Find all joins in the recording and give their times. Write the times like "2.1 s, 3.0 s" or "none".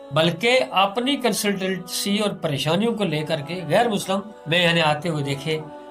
4.4 s

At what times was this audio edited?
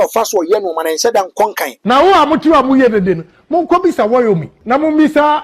1.7 s, 4.5 s

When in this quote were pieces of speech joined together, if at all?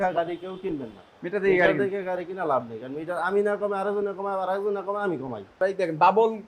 5.5 s

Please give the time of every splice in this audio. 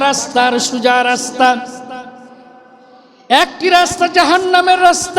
2.6 s

